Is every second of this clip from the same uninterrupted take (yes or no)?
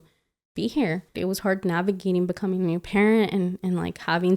no